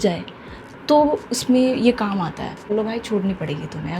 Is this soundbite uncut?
no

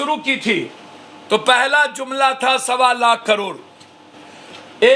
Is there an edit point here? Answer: no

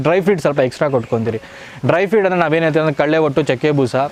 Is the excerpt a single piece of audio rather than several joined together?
yes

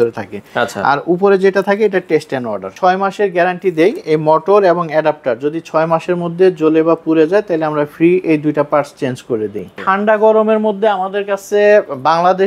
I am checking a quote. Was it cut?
yes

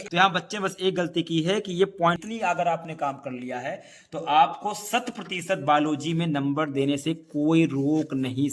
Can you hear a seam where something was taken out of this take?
yes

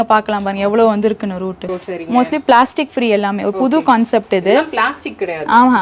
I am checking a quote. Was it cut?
yes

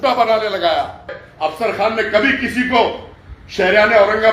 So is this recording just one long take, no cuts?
no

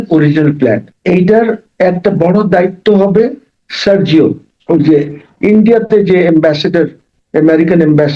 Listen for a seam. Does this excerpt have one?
yes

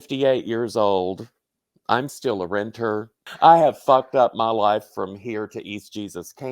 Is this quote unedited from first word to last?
no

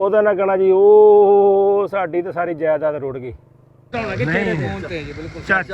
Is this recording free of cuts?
no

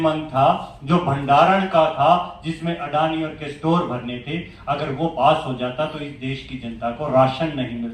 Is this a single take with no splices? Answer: yes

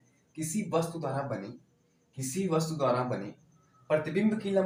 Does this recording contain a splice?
no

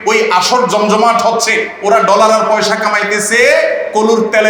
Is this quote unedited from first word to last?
yes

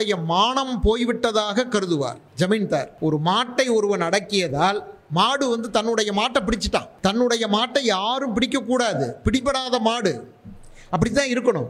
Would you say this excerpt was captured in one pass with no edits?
no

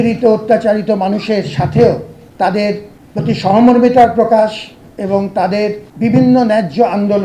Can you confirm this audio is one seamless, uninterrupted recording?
no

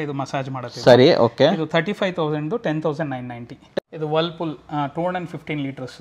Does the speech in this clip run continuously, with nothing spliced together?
no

